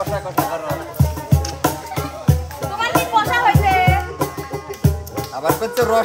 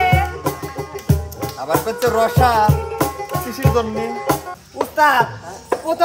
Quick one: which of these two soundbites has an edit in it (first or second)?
second